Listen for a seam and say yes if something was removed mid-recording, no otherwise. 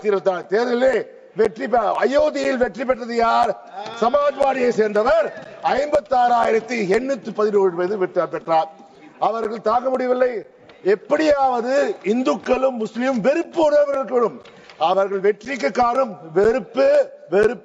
no